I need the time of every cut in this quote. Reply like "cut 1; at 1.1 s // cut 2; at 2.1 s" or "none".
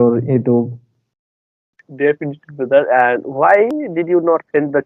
none